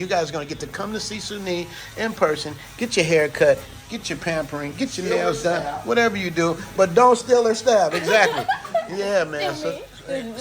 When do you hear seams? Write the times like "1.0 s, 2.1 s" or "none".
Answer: none